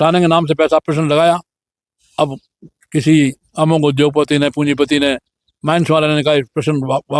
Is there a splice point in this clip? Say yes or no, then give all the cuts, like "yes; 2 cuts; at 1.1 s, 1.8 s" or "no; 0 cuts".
no; 0 cuts